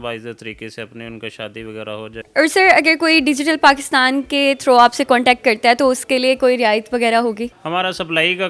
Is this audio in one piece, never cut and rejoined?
no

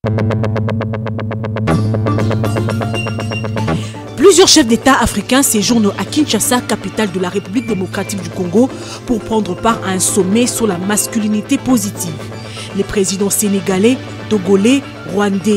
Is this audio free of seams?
no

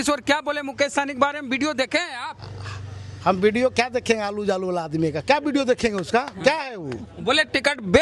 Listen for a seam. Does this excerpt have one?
no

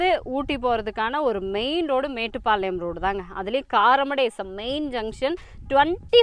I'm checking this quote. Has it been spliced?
no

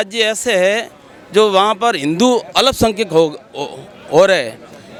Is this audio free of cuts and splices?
yes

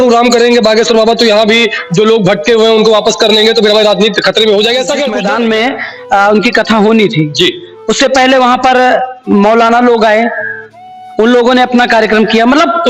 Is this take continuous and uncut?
no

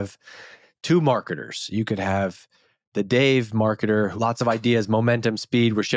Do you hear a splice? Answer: yes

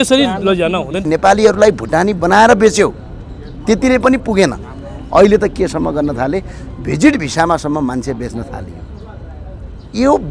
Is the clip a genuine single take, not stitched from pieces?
no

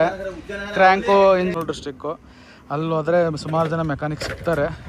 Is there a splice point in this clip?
yes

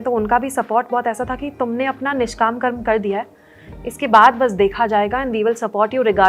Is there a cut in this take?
no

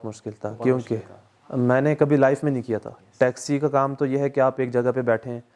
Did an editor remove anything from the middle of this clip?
no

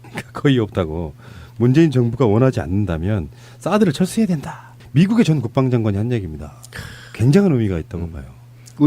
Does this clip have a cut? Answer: yes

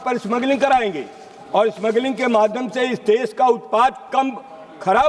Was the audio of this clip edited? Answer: no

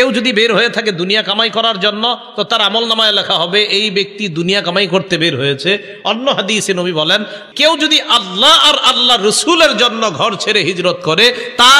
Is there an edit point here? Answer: yes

